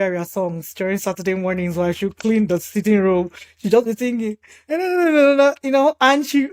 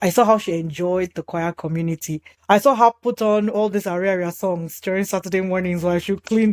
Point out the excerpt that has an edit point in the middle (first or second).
second